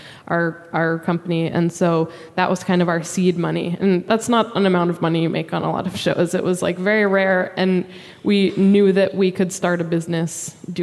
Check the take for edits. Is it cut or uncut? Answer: cut